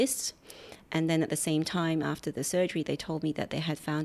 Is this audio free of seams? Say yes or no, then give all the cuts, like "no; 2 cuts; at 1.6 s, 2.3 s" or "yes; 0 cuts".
yes; 0 cuts